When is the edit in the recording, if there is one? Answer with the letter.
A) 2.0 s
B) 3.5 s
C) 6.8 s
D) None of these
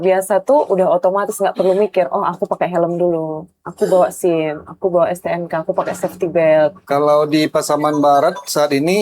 C